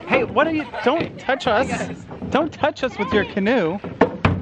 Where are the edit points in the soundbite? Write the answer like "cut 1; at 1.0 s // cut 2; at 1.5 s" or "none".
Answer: none

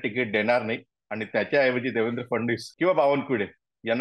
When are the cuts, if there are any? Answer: cut 1; at 2.7 s

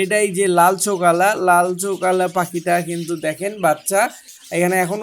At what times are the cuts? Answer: none

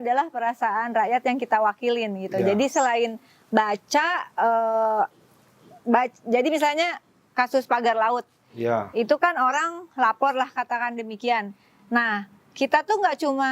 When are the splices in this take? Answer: none

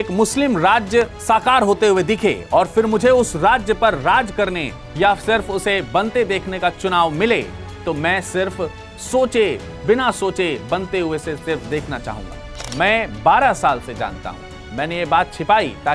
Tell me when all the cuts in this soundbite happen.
cut 1; at 12.7 s

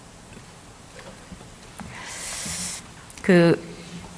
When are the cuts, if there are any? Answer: none

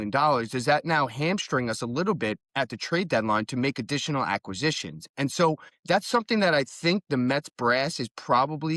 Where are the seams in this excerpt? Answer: none

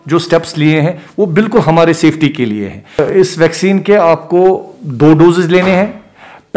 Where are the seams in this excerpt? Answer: cut 1; at 3.1 s

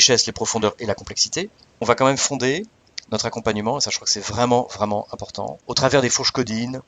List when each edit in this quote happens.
cut 1; at 1.8 s // cut 2; at 5.6 s

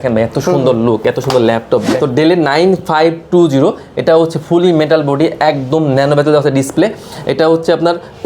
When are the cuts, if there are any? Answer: cut 1; at 1.9 s

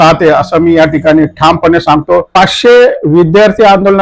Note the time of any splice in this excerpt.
cut 1; at 2.3 s

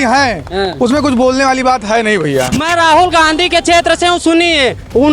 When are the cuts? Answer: cut 1; at 2.6 s

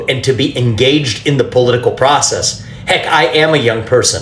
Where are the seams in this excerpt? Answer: cut 1; at 1.1 s // cut 2; at 2.5 s

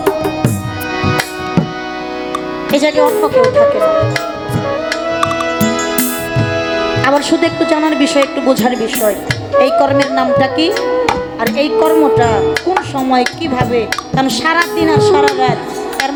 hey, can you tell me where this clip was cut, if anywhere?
none

